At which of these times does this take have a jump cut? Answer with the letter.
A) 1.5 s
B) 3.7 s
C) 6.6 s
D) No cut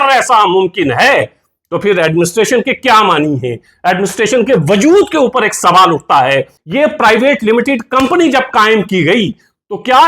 C